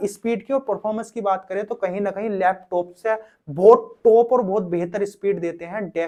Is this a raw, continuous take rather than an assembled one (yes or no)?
yes